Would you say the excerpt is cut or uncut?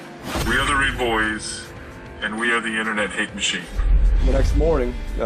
cut